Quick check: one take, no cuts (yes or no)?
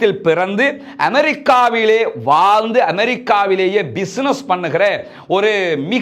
yes